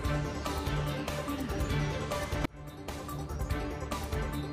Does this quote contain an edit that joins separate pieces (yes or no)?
yes